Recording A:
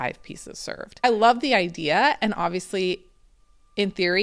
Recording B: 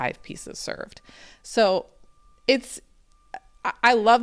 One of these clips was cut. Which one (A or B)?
A